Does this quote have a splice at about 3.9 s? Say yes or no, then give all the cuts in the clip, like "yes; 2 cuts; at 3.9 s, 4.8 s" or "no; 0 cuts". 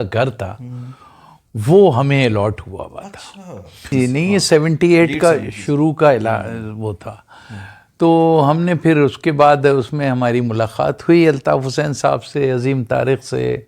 yes; 1 cut; at 3.9 s